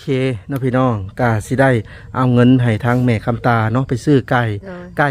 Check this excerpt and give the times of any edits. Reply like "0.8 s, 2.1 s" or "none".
none